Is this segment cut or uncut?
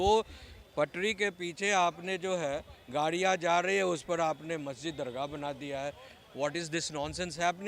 uncut